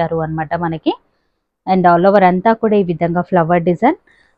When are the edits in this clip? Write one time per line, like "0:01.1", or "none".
none